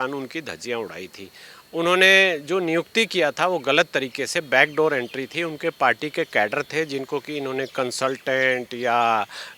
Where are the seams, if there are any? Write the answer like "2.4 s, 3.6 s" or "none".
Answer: none